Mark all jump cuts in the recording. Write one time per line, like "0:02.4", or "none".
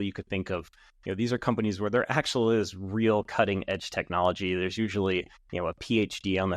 0:05.4